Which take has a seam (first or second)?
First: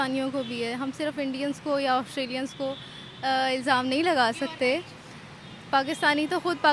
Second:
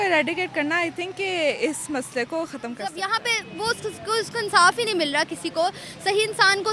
second